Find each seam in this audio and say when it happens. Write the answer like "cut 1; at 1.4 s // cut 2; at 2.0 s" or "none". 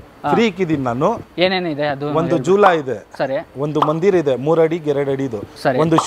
cut 1; at 1.2 s

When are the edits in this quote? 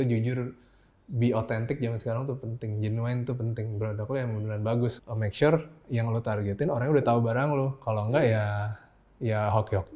cut 1; at 5.0 s

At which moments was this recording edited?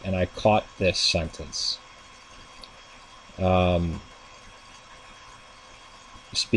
cut 1; at 2.4 s

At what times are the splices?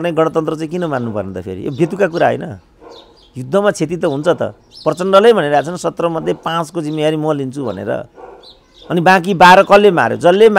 none

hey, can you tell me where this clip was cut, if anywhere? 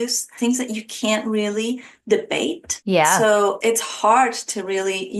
cut 1; at 3.6 s

